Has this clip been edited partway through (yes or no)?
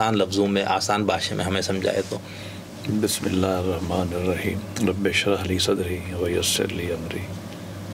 no